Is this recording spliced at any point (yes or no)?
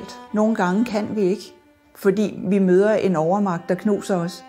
no